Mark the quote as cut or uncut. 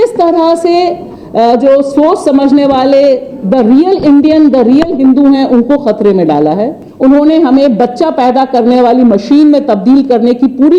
cut